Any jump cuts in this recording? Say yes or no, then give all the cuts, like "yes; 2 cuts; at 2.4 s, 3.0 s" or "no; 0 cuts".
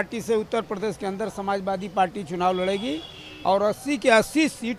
no; 0 cuts